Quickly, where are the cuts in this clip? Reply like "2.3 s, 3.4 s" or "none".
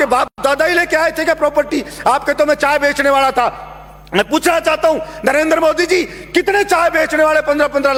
none